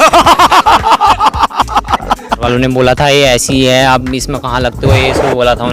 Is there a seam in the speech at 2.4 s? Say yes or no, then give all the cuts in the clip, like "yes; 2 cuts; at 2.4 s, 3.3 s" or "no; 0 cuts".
yes; 1 cut; at 2.4 s